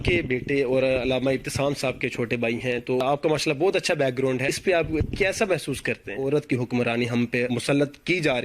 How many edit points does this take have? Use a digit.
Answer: 4